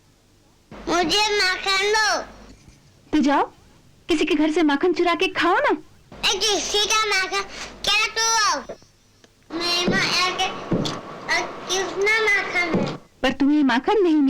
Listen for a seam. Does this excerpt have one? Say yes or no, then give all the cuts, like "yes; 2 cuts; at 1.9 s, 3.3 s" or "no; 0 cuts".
yes; 1 cut; at 13.0 s